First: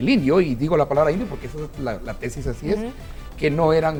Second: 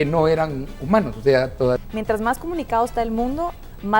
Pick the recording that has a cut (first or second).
second